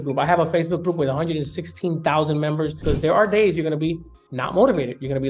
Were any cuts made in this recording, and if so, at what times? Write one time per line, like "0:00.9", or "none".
0:02.8